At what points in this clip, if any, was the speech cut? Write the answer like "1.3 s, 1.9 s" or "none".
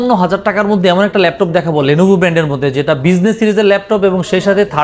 none